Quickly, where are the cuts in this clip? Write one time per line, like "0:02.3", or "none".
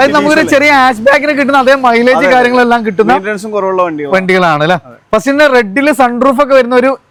none